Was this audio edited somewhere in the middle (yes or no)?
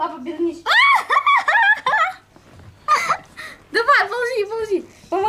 no